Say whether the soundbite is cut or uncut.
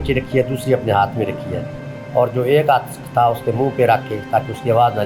uncut